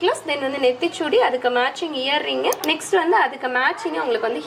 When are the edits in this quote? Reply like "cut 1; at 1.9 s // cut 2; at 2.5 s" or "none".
none